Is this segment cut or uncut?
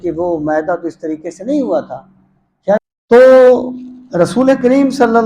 cut